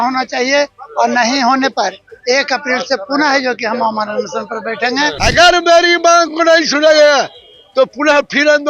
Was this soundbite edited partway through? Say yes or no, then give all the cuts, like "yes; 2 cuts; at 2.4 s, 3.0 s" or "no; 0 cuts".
yes; 1 cut; at 5.2 s